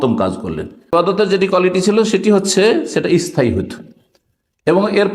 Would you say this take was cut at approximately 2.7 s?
no; 1 cut; at 0.9 s

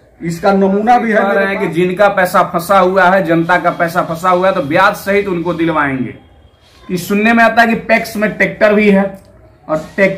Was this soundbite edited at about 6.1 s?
yes; 2 cuts; at 1.4 s, 6.1 s

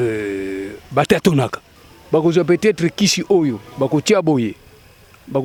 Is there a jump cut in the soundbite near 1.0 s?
no; 0 cuts

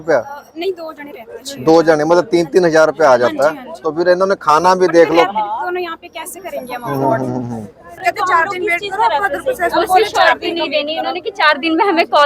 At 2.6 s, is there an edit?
no; 1 cut; at 8.0 s

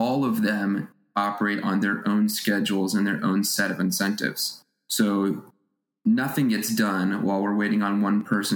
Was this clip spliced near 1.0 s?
yes; 1 cut; at 1.0 s

